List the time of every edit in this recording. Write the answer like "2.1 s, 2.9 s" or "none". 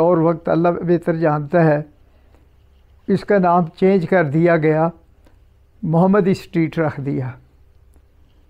none